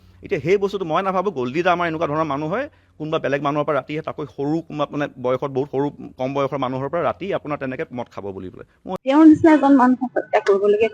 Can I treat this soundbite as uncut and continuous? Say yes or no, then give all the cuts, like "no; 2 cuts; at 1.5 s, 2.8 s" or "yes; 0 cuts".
no; 1 cut; at 8.9 s